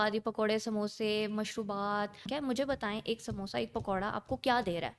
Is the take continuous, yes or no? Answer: no